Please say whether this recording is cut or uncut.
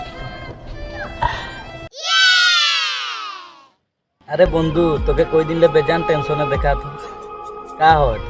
cut